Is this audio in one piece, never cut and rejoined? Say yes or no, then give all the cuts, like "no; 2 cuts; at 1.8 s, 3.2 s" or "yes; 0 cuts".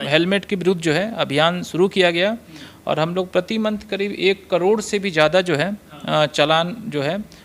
yes; 0 cuts